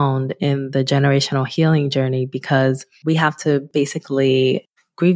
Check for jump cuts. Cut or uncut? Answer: cut